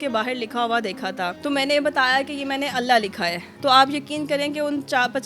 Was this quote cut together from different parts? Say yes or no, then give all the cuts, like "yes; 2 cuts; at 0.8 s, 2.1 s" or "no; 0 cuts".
yes; 2 cuts; at 1.4 s, 3.4 s